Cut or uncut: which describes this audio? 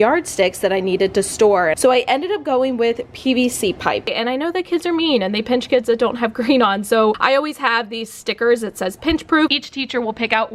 cut